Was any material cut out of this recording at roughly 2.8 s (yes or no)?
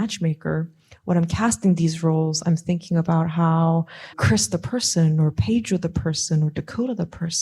no